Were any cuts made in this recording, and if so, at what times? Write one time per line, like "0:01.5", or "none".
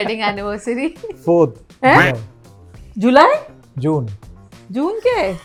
none